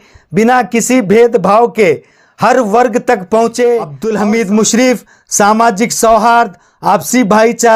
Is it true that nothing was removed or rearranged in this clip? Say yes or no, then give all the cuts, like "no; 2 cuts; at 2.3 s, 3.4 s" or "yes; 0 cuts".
no; 1 cut; at 4.0 s